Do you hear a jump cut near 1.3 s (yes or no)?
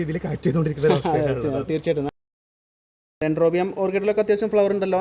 no